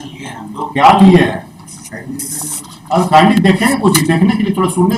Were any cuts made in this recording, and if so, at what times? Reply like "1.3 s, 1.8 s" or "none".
none